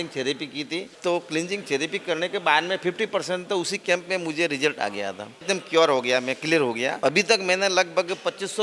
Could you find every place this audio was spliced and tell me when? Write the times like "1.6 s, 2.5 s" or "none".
0.9 s, 5.4 s, 7.0 s